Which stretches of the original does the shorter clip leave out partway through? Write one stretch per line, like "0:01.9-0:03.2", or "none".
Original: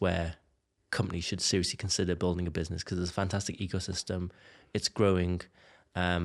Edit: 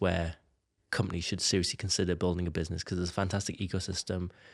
none